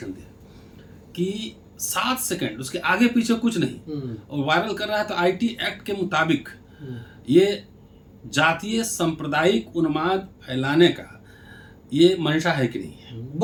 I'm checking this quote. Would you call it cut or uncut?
uncut